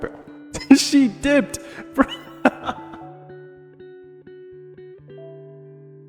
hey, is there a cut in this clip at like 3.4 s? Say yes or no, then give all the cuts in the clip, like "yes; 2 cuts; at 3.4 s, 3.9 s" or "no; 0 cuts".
no; 0 cuts